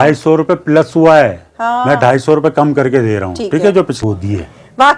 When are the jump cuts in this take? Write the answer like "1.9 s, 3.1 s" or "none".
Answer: 4.0 s